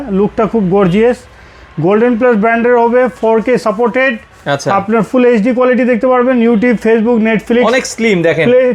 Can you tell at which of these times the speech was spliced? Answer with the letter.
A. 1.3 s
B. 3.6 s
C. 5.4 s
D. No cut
D